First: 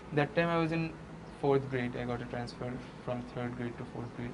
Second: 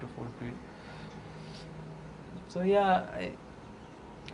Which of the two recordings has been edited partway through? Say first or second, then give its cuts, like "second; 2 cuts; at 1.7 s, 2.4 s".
second; 1 cut; at 2.3 s